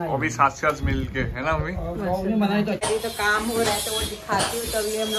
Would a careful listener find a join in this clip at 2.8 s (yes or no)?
yes